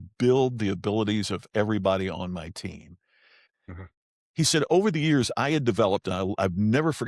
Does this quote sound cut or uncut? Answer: cut